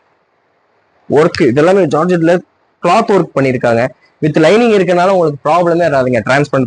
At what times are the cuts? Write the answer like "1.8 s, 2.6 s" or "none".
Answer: none